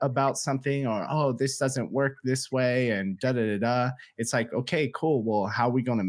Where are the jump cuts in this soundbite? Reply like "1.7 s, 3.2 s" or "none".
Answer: none